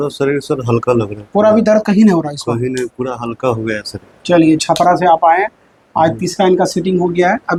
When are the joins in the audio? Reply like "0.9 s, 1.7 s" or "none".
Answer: none